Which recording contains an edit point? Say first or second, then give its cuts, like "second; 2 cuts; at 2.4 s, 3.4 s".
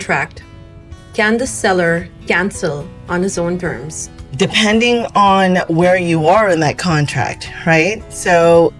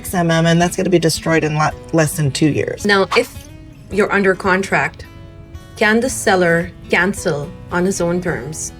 second; 1 cut; at 2.8 s